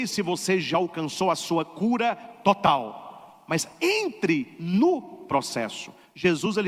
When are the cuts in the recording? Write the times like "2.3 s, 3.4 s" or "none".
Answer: none